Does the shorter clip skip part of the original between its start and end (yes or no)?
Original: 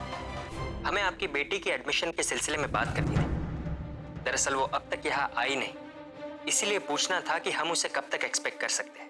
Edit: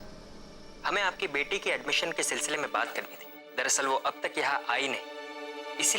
yes